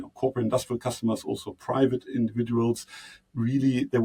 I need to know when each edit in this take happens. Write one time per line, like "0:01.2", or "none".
none